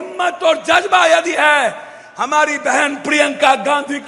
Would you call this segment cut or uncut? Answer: uncut